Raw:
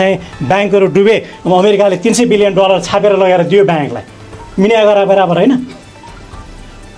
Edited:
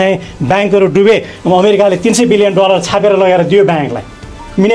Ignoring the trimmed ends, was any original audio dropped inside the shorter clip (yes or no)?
no